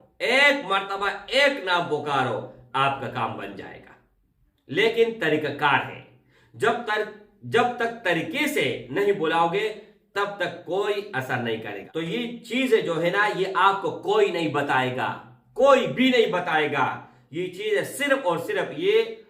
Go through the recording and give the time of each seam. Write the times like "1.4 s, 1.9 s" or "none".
11.8 s